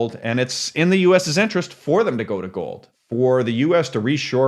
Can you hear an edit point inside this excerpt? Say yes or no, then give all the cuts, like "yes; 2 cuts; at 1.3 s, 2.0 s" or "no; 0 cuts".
yes; 1 cut; at 2.8 s